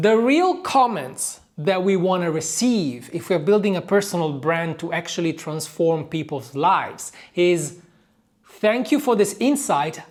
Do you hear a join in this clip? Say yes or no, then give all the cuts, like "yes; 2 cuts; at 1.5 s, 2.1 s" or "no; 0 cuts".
no; 0 cuts